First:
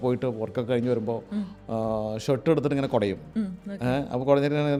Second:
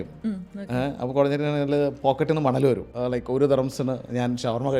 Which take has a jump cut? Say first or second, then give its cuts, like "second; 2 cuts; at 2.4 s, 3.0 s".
second; 1 cut; at 2.9 s